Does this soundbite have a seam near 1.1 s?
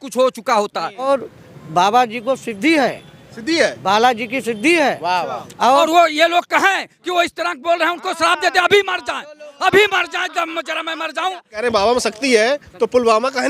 yes; 3 cuts; at 1.1 s, 5.8 s, 11.5 s

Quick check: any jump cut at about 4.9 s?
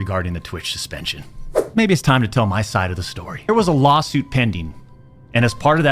no; 2 cuts; at 1.6 s, 3.5 s

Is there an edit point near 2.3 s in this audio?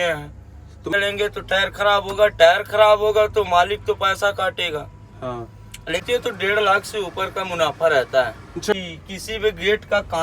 no; 3 cuts; at 0.9 s, 6.0 s, 8.7 s

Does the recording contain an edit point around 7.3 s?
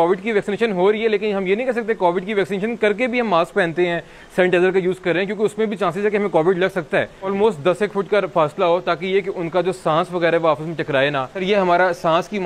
yes; 2 cuts; at 7.3 s, 11.4 s

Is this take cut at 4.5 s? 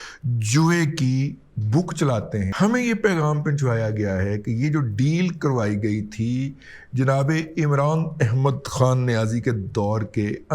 no; 1 cut; at 2.5 s

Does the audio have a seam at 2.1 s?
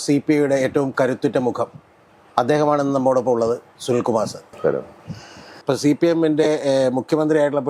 no; 2 cuts; at 4.5 s, 5.6 s

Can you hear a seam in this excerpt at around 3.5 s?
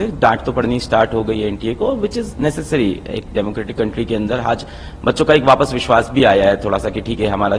no; 0 cuts

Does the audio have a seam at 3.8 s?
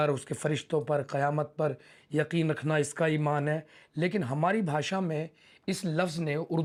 no; 0 cuts

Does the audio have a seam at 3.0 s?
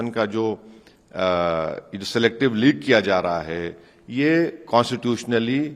no; 0 cuts

